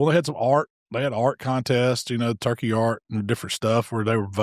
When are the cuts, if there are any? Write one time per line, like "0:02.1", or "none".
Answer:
none